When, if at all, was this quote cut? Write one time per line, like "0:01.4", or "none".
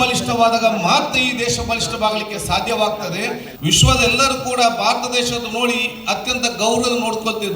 0:03.5